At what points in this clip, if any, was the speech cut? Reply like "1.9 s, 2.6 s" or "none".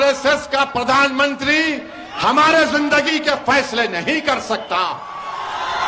none